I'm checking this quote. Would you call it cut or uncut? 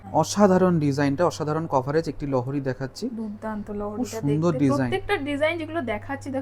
uncut